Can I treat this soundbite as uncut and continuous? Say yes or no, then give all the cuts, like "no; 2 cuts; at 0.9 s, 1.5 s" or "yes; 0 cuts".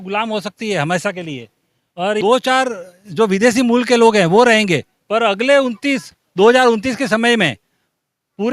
no; 1 cut; at 2.2 s